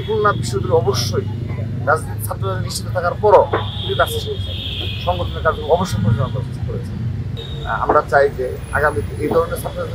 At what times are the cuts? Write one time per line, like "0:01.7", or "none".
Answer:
0:07.3

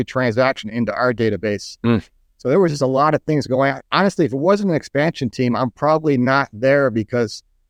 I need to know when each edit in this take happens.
none

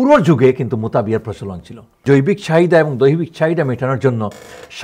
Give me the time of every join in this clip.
0:01.9

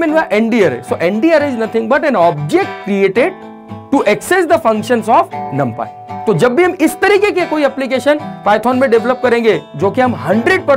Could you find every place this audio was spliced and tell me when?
0:06.1

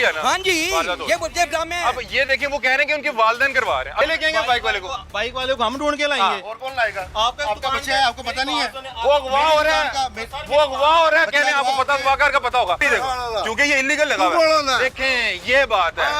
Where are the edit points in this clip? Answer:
0:04.0
0:12.8

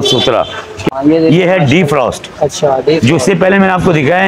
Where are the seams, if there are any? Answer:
0:00.9

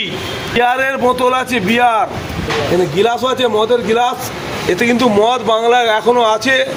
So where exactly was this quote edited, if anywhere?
none

